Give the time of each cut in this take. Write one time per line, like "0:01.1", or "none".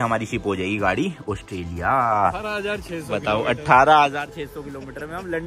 0:02.4